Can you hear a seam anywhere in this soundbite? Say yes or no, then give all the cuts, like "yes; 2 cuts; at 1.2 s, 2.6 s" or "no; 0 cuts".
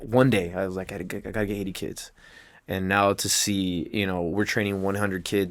no; 0 cuts